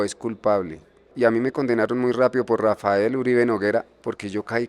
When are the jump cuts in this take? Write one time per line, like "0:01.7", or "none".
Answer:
0:01.1